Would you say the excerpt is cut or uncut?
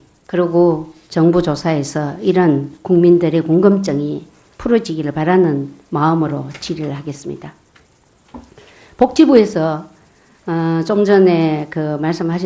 uncut